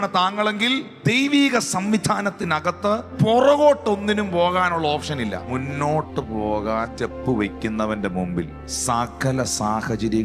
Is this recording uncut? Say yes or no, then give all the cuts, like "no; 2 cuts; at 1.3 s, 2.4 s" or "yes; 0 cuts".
no; 5 cuts; at 0.9 s, 3.1 s, 5.4 s, 6.9 s, 8.6 s